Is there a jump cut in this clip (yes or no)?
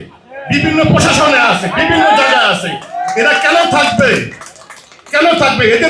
no